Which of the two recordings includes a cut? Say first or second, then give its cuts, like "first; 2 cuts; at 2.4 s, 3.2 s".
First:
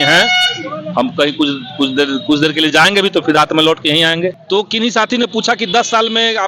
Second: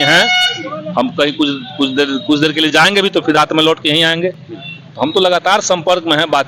first; 1 cut; at 4.4 s